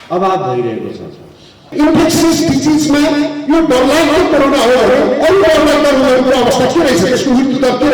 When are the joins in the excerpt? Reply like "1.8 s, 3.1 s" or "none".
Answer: 1.7 s